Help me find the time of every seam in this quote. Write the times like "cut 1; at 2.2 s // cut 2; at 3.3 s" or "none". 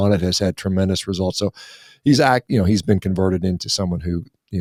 none